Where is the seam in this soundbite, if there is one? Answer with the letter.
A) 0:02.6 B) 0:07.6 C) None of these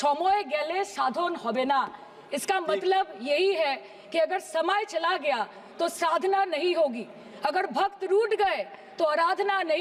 C